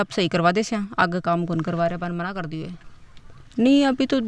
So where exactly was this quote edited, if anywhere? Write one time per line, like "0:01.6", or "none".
0:02.7